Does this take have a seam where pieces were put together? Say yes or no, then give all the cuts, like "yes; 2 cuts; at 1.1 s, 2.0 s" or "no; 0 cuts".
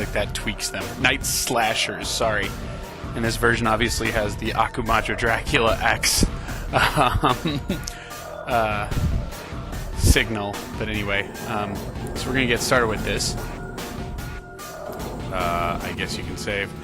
yes; 1 cut; at 8.9 s